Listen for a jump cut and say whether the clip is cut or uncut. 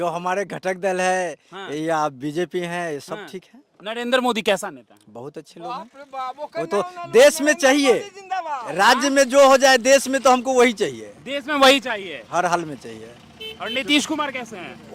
uncut